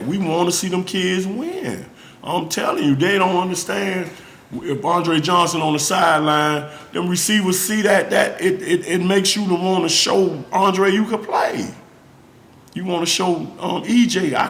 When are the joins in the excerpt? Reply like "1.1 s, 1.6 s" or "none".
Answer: none